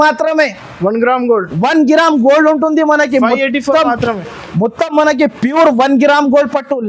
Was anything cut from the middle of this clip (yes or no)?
no